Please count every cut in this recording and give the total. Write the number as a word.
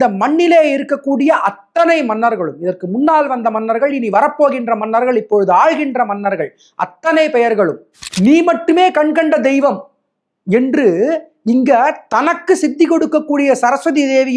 one